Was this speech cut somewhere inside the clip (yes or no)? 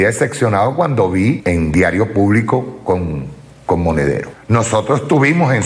yes